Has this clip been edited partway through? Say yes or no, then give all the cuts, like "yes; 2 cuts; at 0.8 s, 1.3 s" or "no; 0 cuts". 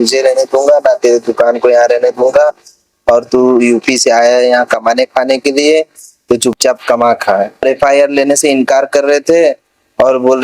yes; 1 cut; at 7.6 s